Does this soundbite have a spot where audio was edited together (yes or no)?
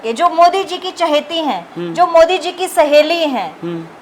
no